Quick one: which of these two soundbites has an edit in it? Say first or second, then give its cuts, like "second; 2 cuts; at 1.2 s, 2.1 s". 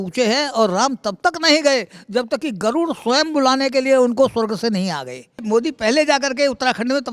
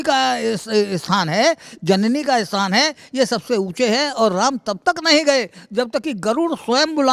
first; 1 cut; at 5.4 s